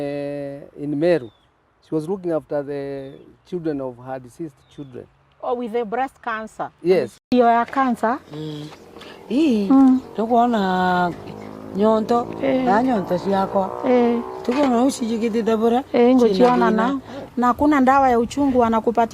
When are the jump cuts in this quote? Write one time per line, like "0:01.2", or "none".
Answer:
none